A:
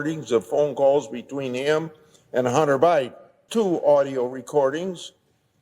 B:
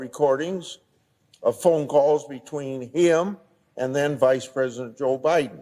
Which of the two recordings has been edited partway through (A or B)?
A